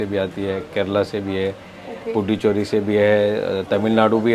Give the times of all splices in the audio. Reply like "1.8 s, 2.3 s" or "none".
none